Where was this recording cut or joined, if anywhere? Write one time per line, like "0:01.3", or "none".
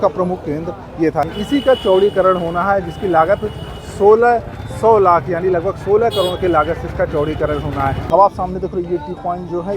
0:01.3
0:08.0